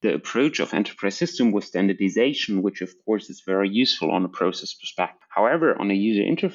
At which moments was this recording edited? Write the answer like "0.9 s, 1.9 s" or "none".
5.2 s